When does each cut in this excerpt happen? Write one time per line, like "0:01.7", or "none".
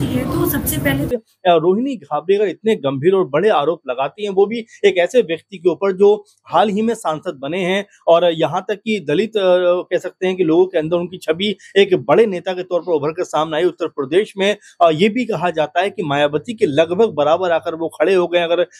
0:01.1